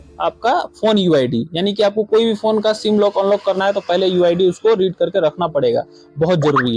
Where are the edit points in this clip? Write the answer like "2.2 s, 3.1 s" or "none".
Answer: none

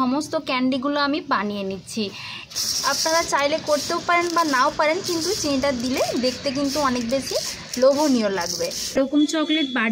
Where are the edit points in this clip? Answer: 2.5 s, 9.0 s

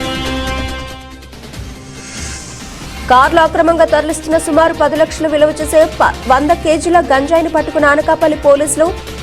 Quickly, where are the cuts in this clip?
1.5 s, 3.1 s

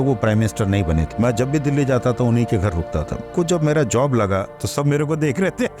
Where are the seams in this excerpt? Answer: 1.1 s, 3.2 s, 4.6 s

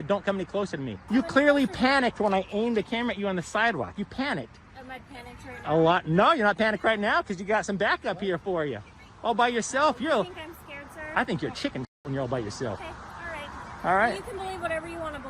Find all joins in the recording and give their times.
0.9 s

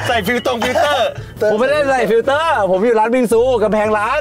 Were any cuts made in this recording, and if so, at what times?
1.4 s

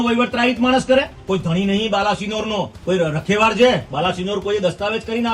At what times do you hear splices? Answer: 1.2 s, 2.8 s

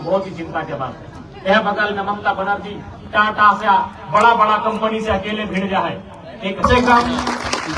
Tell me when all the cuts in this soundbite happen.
6.6 s

